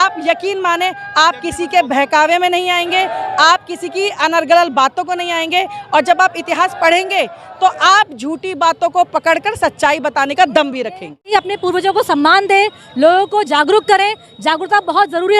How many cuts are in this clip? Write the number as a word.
one